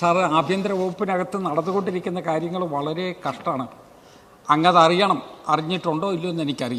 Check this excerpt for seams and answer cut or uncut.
uncut